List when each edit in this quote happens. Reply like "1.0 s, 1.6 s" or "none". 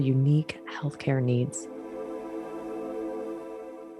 1.6 s